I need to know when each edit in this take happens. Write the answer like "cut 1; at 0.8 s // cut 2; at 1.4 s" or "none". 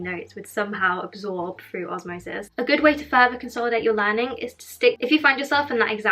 cut 1; at 2.5 s // cut 2; at 5.0 s

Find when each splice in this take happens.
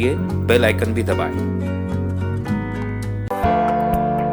cut 1; at 3.3 s

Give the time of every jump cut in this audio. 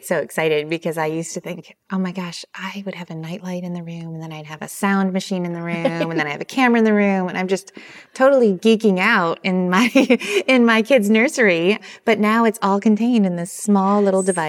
none

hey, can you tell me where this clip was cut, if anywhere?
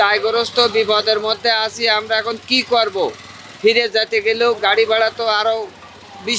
none

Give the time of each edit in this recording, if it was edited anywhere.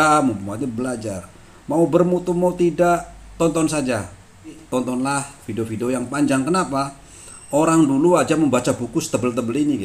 cut 1; at 4.6 s

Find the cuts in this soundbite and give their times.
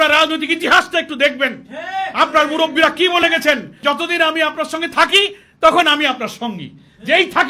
cut 1; at 3.7 s

